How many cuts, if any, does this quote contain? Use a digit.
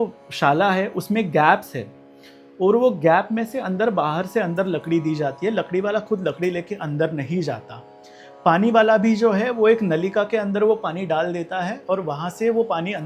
0